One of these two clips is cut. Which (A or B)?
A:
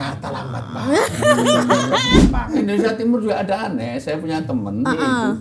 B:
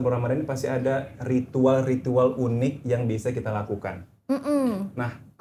A